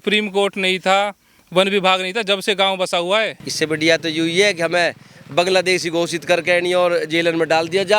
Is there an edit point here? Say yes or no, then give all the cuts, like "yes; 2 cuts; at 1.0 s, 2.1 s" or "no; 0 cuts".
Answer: yes; 1 cut; at 3.4 s